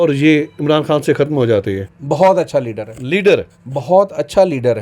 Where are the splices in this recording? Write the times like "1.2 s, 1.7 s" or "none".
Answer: 1.9 s